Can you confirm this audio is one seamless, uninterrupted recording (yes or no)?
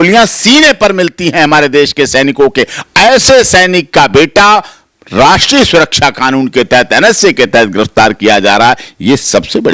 yes